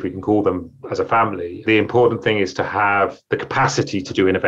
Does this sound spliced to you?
no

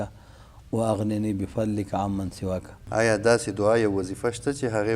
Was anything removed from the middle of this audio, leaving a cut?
yes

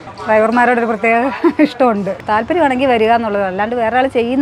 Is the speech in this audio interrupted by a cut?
yes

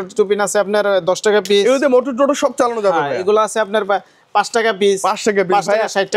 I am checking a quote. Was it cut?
no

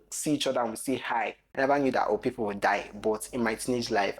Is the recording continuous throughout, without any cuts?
no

